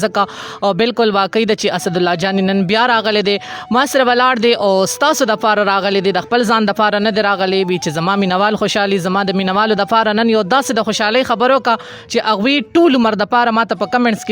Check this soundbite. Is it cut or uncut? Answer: uncut